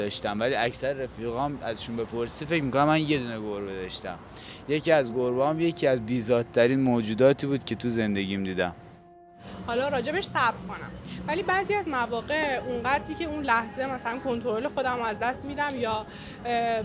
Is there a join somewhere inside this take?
yes; 1 cut; at 9.4 s

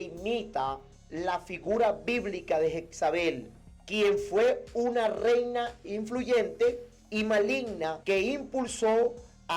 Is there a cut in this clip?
yes; 1 cut; at 8.0 s

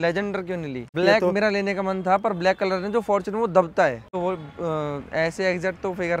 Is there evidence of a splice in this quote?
yes; 2 cuts; at 0.9 s, 4.1 s

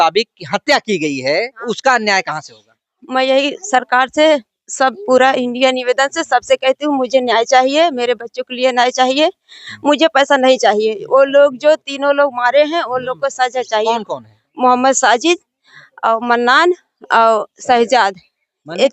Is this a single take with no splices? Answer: no; 2 cuts; at 1.6 s, 13.9 s

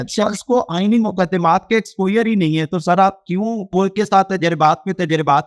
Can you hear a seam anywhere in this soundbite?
yes; 1 cut; at 3.7 s

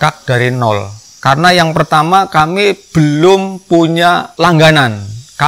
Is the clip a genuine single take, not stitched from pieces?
no; 1 cut; at 4.3 s

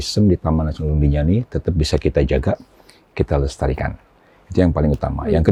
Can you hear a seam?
no; 0 cuts

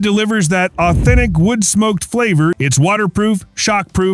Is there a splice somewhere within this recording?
yes; 1 cut; at 2.6 s

